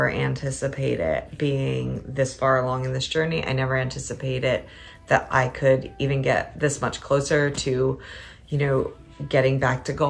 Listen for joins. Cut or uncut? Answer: uncut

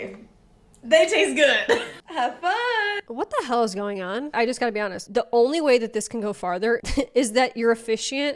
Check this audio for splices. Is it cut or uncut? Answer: cut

